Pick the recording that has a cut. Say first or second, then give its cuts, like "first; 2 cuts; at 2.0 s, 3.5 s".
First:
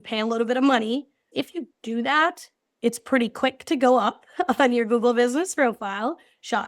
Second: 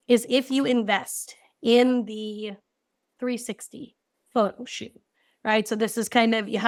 first; 1 cut; at 1.3 s